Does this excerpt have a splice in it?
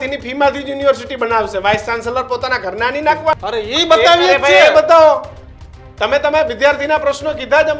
yes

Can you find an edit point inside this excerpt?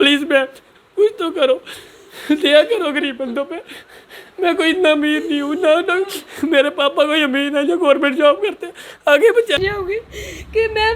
yes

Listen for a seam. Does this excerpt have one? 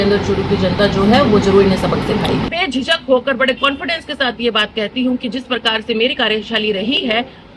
yes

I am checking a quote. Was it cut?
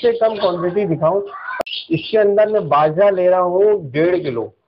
yes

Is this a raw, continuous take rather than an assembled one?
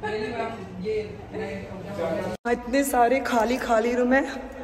no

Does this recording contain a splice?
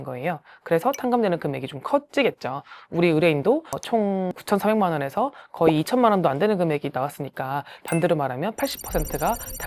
no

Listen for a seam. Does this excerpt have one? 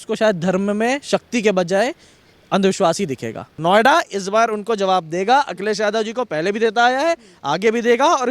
yes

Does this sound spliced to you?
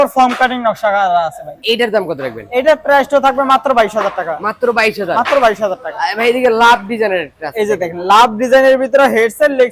no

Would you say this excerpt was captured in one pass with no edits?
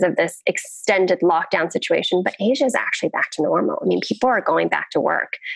yes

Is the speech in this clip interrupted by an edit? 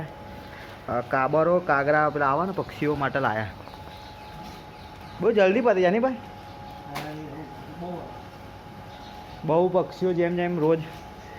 no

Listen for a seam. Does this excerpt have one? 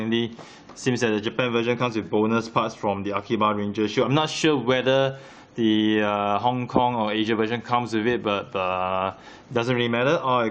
yes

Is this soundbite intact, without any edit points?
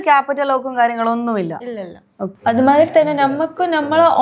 no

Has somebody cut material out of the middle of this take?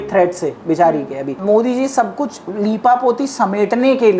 yes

